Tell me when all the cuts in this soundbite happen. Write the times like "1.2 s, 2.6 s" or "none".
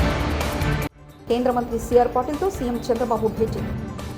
1.1 s